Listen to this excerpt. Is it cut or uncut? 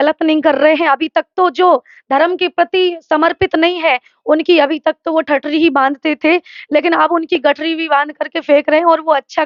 uncut